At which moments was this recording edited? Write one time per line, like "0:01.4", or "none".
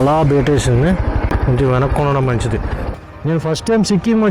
0:01.3
0:02.8